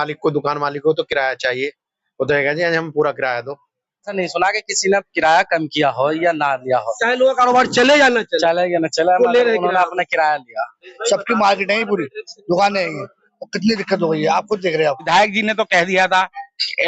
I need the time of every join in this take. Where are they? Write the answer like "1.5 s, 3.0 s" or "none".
4.1 s, 10.9 s, 15.0 s